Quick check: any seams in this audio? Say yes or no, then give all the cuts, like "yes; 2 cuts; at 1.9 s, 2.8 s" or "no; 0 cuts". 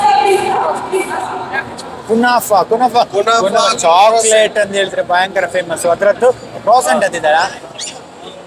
no; 0 cuts